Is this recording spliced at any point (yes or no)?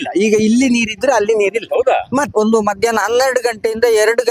yes